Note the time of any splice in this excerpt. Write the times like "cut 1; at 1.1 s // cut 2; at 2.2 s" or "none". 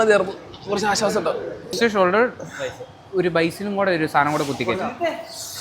cut 1; at 1.8 s